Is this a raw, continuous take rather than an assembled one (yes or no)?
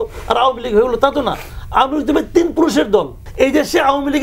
no